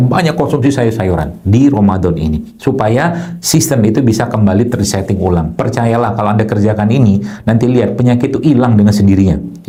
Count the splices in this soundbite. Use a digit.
0